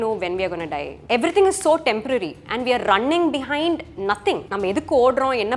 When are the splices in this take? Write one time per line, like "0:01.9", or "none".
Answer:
0:00.9
0:04.5